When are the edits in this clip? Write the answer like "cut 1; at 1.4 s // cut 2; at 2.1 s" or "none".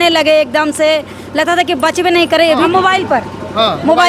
cut 1; at 2.7 s